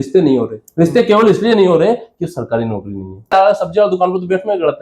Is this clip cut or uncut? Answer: cut